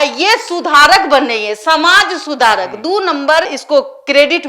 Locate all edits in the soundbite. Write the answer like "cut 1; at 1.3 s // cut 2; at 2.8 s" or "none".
none